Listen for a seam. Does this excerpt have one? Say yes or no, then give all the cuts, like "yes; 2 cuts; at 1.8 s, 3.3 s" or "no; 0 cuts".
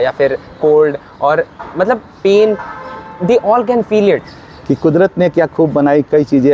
yes; 1 cut; at 4.4 s